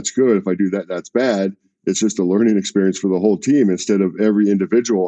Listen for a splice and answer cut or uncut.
cut